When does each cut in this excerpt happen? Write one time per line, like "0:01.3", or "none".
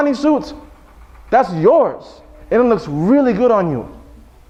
none

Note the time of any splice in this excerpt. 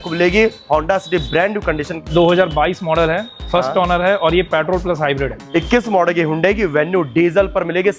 0:02.1
0:05.4

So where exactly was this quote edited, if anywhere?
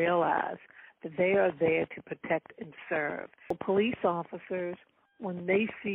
0:03.6

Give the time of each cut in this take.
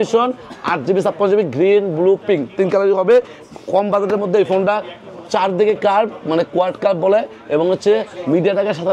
none

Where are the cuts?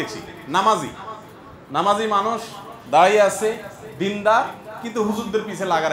none

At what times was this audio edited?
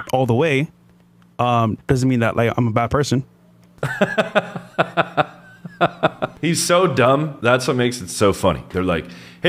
none

